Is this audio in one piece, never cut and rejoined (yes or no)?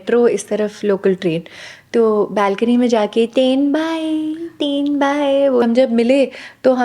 no